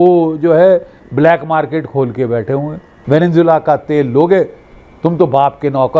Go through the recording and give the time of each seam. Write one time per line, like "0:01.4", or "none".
0:02.9